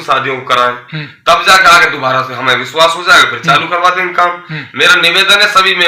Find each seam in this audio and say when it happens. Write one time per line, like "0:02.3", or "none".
none